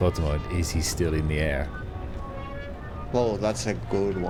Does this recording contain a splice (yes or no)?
no